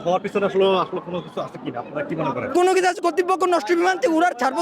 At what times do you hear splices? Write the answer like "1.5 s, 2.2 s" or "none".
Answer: 2.6 s